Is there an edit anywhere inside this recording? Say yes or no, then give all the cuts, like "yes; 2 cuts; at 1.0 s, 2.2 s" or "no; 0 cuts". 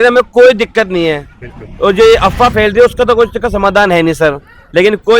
no; 0 cuts